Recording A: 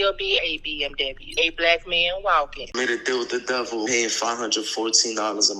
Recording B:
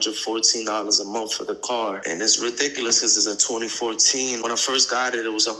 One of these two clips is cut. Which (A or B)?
A